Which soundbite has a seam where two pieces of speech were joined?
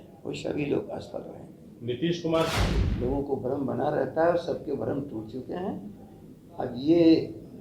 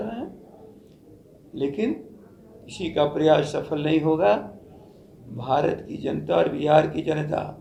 first; 1 cut; at 2.6 s

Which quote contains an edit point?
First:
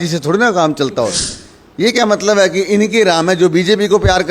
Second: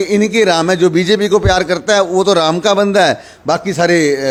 first; 1 cut; at 1.3 s

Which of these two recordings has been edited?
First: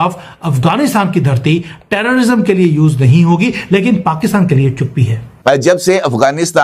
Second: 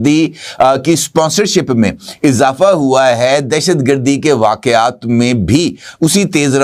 first; 1 cut; at 5.3 s

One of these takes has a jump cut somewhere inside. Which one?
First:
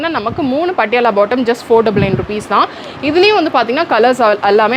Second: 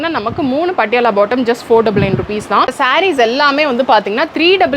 second; 1 cut; at 2.7 s

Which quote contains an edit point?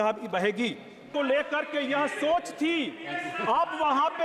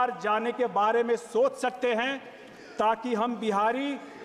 first; 1 cut; at 1.1 s

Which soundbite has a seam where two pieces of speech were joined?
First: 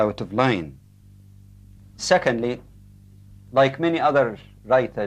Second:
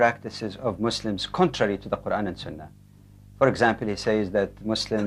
second; 1 cut; at 3.5 s

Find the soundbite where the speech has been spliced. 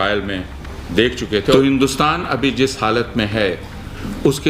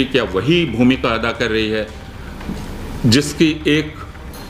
first; 1 cut; at 1.5 s

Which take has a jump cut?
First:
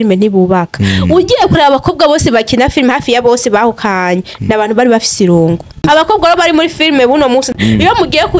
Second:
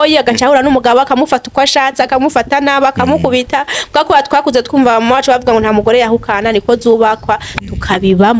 first; 2 cuts; at 5.8 s, 7.5 s

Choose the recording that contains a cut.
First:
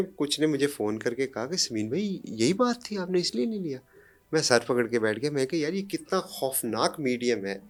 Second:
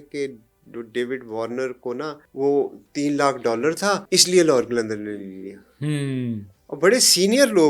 second; 2 cuts; at 2.2 s, 4.0 s

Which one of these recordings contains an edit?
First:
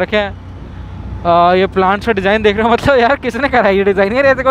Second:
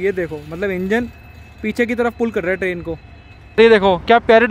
second; 1 cut; at 3.6 s

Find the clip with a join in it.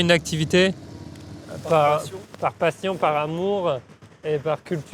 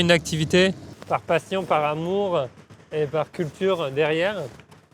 second; 1 cut; at 0.9 s

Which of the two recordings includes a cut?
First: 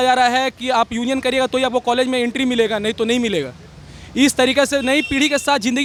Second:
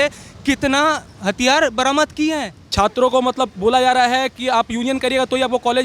second; 1 cut; at 2.6 s

